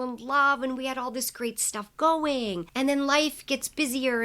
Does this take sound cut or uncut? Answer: cut